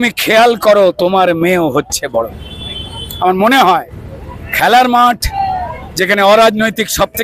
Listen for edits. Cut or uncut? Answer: uncut